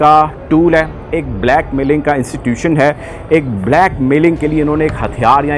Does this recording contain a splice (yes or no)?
no